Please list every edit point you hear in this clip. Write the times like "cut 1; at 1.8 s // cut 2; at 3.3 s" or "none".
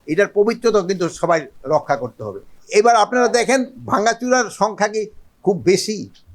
cut 1; at 2.5 s